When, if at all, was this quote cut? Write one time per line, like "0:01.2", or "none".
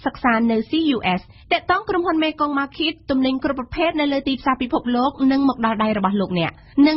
0:01.4